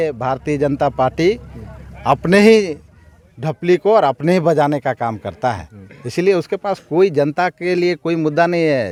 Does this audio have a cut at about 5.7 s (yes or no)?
no